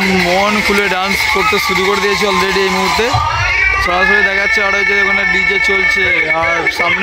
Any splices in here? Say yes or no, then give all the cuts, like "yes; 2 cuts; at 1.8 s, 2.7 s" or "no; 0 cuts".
no; 0 cuts